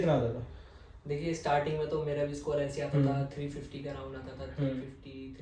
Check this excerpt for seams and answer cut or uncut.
uncut